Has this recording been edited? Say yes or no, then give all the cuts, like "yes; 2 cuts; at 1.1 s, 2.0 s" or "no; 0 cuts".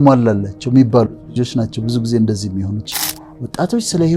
yes; 1 cut; at 2.9 s